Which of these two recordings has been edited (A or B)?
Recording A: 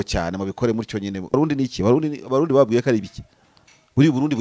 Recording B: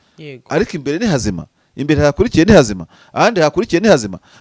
A